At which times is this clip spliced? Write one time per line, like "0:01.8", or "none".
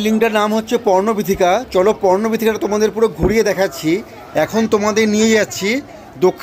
0:04.2